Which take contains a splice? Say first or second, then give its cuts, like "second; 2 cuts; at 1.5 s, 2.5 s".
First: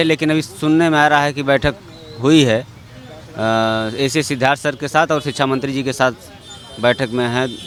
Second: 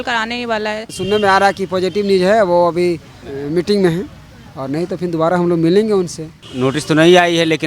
second; 2 cuts; at 0.9 s, 6.4 s